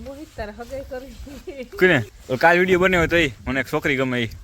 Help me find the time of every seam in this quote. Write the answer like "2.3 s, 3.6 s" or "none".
2.1 s